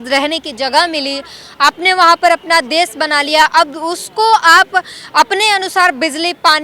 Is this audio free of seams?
yes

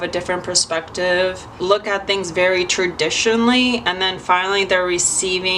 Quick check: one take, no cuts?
no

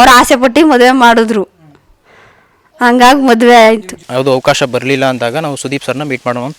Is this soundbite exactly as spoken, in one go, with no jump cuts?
no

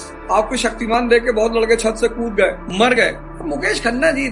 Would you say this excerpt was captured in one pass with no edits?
yes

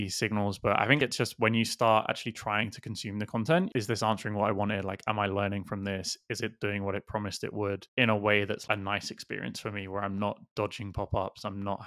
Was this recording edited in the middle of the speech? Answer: yes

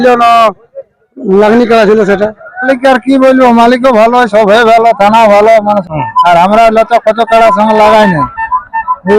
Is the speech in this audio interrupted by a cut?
yes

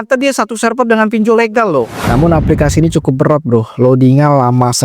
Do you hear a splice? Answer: yes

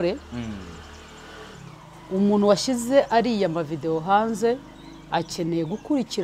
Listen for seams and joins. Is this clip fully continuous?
yes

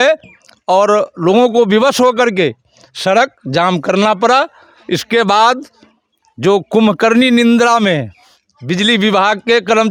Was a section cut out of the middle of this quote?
no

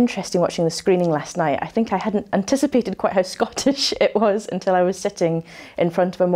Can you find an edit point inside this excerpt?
no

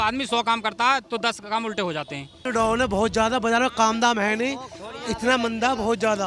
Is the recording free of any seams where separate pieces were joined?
no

